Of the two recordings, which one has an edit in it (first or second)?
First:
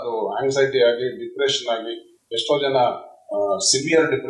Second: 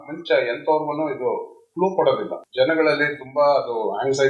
second